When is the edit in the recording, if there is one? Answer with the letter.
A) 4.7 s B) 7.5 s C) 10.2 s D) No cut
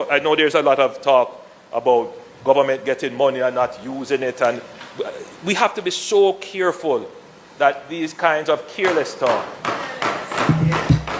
D